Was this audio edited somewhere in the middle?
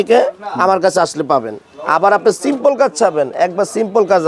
no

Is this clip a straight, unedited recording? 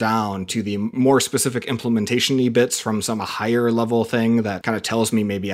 no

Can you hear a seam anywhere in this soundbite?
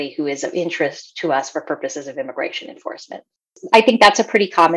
yes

